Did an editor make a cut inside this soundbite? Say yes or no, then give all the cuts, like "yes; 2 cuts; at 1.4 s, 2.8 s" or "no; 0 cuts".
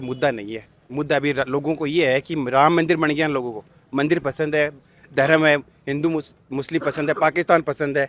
no; 0 cuts